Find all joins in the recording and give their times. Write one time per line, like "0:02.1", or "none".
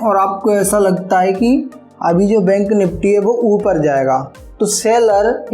none